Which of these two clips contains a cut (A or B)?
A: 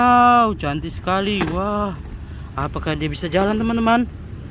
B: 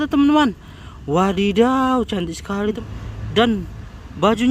B